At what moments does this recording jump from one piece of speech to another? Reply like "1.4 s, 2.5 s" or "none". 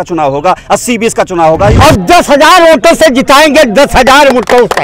1.7 s